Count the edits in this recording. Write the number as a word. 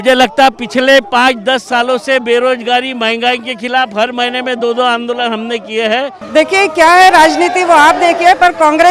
one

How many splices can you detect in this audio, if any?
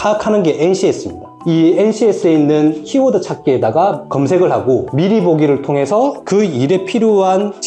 one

